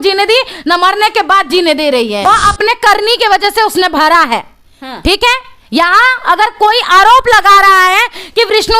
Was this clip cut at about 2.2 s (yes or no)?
yes